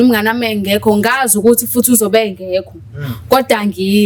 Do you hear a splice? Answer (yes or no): no